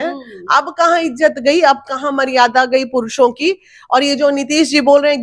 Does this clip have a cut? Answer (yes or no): no